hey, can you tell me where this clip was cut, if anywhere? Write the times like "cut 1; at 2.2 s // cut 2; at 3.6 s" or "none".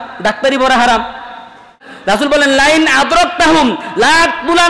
cut 1; at 1.8 s